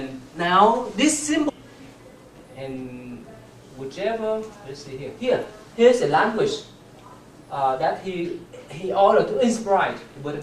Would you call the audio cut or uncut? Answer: uncut